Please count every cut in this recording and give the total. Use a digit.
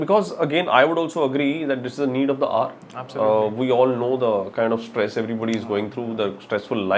0